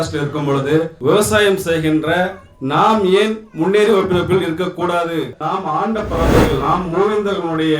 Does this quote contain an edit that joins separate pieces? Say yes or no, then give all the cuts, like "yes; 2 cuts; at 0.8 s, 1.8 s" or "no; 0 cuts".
yes; 1 cut; at 5.4 s